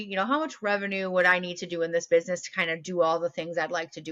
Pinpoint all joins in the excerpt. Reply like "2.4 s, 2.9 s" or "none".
none